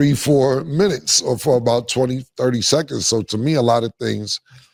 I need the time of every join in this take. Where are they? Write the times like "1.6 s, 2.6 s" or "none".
none